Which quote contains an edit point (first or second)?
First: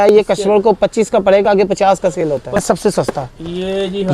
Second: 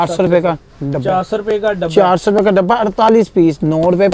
first